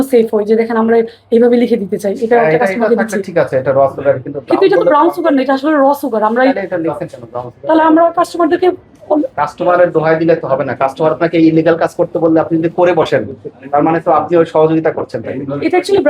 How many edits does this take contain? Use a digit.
0